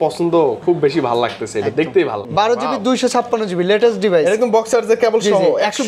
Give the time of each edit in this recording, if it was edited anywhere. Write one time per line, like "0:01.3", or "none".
0:02.2

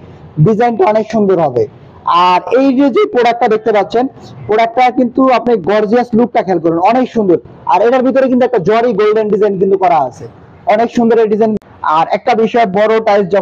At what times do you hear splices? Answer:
0:11.5

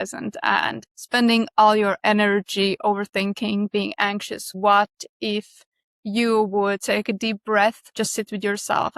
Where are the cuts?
0:00.9
0:04.5
0:07.8

